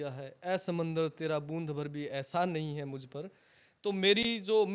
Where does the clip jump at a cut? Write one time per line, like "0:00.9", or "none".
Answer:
none